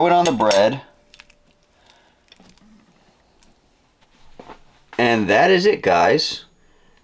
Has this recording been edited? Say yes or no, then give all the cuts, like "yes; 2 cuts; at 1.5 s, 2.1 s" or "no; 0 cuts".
yes; 1 cut; at 4.1 s